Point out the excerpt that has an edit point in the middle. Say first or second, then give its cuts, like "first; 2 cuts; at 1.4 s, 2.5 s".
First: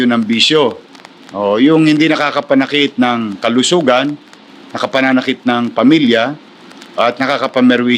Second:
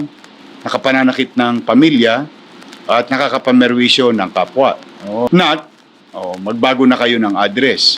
second; 1 cut; at 5.3 s